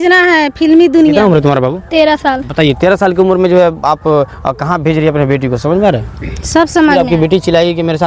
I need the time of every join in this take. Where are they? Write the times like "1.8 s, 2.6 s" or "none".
1.1 s, 7.0 s